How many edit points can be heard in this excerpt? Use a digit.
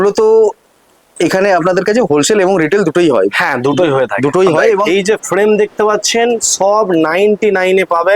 1